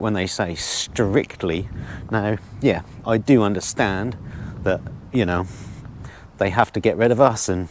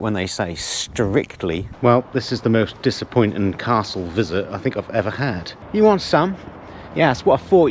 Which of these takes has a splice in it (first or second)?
second